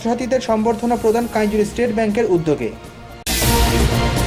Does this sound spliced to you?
no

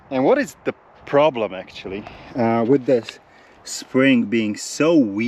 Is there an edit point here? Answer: no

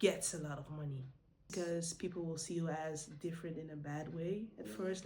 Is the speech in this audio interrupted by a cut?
yes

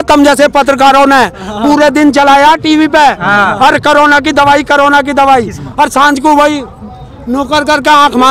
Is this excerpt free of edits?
yes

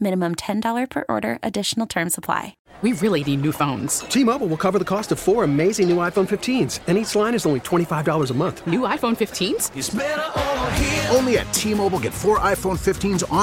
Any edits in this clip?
yes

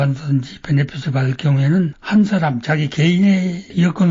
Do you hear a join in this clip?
yes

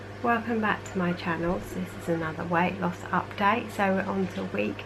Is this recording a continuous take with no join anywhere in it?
no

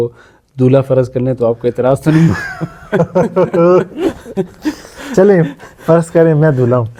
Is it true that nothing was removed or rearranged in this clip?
yes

